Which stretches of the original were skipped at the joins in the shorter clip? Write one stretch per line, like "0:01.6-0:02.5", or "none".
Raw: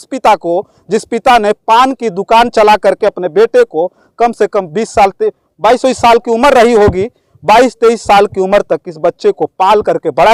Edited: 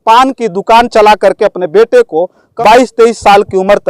0:04.0-0:07.3